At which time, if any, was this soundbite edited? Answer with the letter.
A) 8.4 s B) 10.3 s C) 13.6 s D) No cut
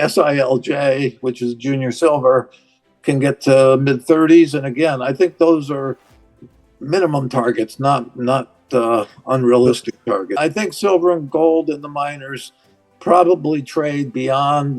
B